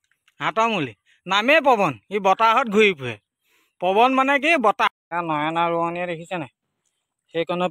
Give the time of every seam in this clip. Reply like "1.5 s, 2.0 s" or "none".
5.0 s